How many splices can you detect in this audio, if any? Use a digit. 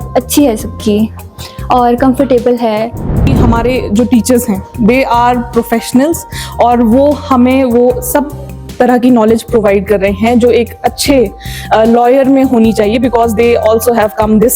1